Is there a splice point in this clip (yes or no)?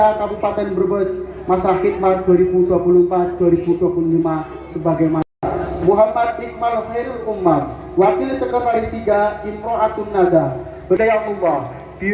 yes